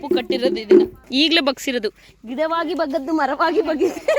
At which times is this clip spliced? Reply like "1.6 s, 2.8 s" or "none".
1.0 s